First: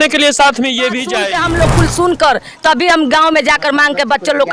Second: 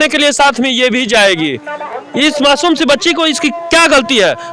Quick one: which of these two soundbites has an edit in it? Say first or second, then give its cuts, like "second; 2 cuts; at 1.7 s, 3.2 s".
first; 1 cut; at 1.1 s